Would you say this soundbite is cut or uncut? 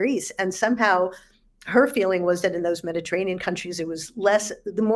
uncut